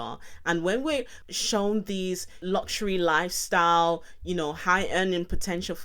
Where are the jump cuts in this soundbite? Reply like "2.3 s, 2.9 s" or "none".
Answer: 1.2 s, 2.4 s